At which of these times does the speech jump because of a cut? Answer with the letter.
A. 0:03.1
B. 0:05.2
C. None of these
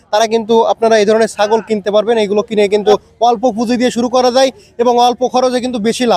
A